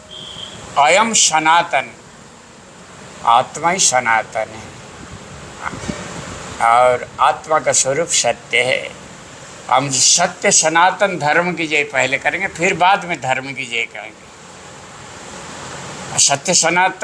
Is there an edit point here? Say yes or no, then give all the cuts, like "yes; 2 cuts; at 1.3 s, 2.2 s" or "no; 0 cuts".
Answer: no; 0 cuts